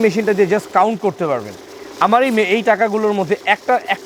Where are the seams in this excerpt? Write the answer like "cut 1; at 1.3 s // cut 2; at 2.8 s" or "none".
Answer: none